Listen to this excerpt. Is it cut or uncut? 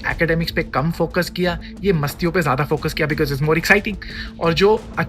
uncut